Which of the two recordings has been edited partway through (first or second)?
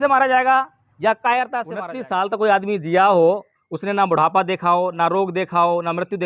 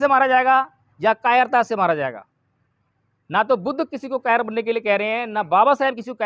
first